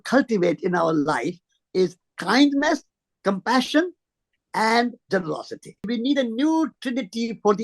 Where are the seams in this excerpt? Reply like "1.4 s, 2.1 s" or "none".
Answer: 5.9 s

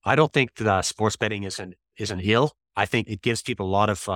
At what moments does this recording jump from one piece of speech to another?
2.6 s

